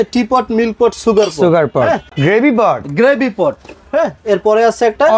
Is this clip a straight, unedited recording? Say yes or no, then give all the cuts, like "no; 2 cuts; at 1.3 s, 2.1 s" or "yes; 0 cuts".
no; 1 cut; at 2.1 s